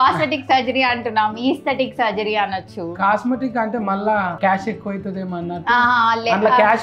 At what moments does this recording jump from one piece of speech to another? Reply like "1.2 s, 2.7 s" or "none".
none